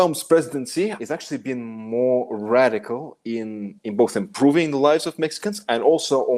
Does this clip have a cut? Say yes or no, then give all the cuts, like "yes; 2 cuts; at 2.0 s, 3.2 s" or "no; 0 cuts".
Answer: yes; 1 cut; at 1.0 s